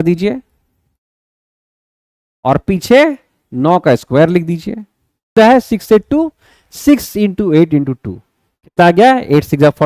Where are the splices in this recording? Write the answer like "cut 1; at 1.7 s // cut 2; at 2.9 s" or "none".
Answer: cut 1; at 5.4 s